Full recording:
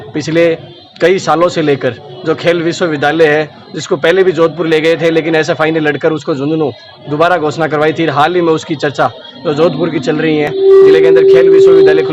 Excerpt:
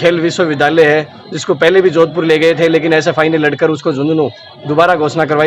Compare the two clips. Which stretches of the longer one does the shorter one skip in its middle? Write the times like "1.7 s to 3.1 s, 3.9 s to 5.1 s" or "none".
none